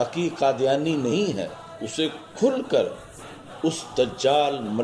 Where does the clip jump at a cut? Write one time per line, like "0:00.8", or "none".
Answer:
0:01.8